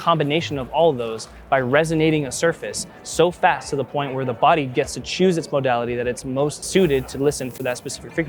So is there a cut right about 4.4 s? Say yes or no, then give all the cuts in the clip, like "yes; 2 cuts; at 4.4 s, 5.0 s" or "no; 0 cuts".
no; 1 cut; at 6.6 s